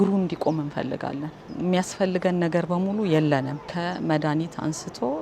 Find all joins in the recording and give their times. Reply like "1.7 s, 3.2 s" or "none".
1.4 s, 3.6 s